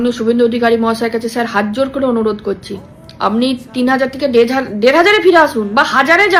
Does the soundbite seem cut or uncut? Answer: uncut